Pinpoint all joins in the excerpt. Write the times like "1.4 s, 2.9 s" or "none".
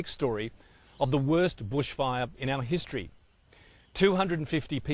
1.1 s